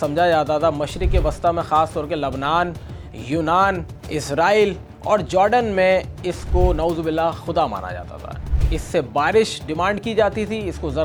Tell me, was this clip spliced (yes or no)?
no